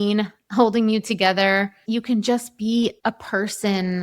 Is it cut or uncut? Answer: cut